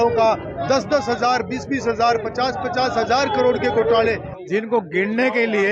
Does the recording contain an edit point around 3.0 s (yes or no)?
no